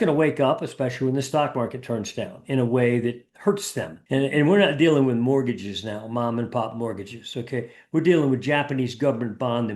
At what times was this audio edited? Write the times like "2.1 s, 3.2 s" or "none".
3.9 s